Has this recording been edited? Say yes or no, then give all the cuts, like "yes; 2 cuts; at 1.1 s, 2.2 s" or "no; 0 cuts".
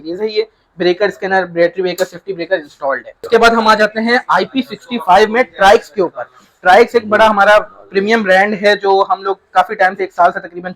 yes; 1 cut; at 3.2 s